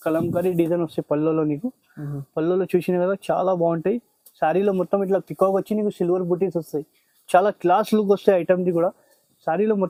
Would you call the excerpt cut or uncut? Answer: uncut